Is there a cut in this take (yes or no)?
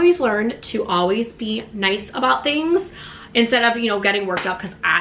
no